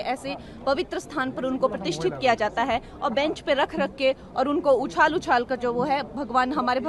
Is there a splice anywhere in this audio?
no; 0 cuts

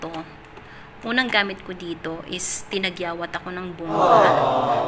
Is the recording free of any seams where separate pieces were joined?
no; 1 cut; at 3.9 s

